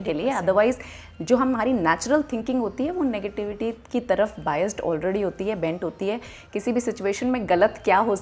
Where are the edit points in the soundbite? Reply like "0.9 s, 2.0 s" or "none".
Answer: none